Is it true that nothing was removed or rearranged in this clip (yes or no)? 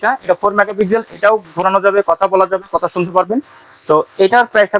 yes